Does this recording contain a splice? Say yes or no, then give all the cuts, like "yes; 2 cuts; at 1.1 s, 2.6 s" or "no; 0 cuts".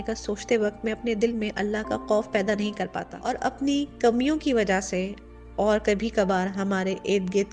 yes; 1 cut; at 3.1 s